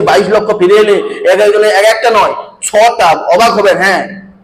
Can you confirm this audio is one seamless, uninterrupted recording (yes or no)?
yes